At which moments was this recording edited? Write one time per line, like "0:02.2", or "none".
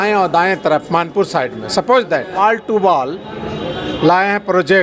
0:02.4